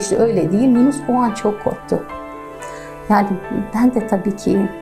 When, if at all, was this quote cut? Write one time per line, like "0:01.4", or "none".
none